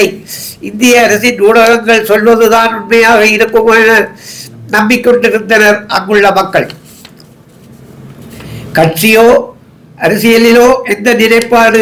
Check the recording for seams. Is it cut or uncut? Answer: uncut